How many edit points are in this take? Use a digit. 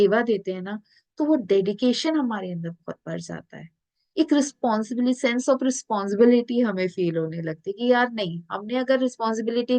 0